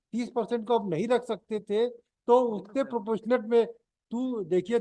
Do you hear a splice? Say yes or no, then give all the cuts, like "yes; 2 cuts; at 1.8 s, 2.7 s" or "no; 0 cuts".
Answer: no; 0 cuts